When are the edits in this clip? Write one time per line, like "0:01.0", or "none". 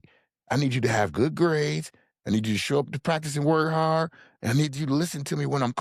none